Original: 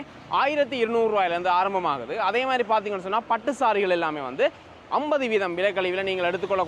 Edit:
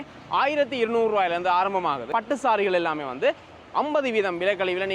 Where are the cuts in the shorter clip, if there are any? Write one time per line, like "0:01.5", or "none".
0:02.1